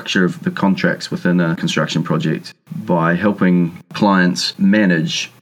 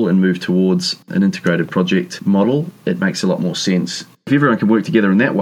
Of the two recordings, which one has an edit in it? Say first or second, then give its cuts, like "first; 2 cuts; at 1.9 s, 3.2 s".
second; 3 cuts; at 1.0 s, 2.7 s, 4.3 s